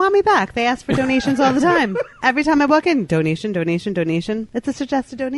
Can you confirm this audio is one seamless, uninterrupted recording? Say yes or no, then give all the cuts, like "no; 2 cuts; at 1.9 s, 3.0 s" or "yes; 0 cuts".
no; 2 cuts; at 2.1 s, 4.5 s